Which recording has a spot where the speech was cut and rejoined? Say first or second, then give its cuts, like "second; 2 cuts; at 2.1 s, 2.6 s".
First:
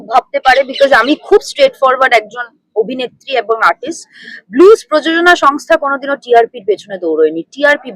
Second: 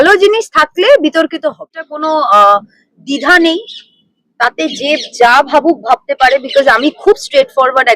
second; 1 cut; at 1.7 s